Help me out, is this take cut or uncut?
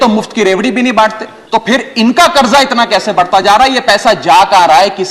cut